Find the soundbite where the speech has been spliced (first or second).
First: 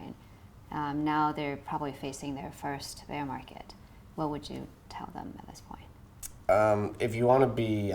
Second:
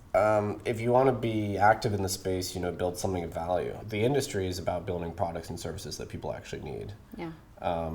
second